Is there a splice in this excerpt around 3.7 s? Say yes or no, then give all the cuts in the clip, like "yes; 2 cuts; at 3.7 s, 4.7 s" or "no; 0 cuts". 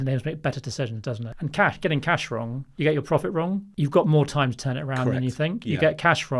yes; 3 cuts; at 1.3 s, 2.6 s, 3.7 s